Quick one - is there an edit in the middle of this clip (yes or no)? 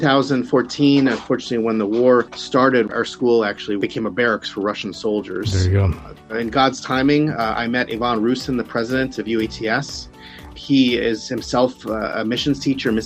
yes